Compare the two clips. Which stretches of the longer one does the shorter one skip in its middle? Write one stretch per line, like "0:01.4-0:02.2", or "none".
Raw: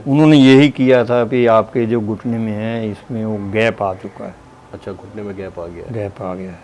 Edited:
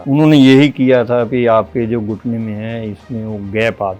none